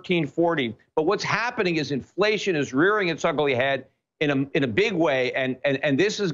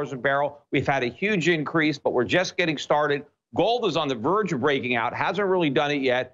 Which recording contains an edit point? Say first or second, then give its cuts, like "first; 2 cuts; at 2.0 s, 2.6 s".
second; 1 cut; at 4.8 s